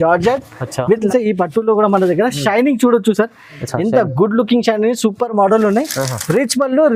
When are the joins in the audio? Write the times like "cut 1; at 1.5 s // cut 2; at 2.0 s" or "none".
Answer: cut 1; at 1.1 s